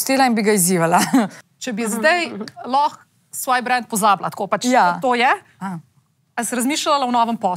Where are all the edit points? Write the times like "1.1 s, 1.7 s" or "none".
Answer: 1.4 s